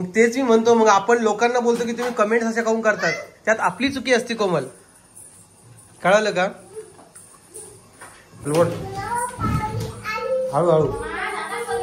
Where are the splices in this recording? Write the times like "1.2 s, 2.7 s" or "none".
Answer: 8.5 s